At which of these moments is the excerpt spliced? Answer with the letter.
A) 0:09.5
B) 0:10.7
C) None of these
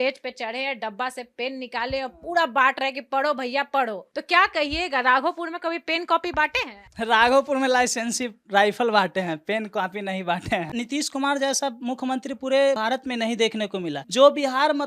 B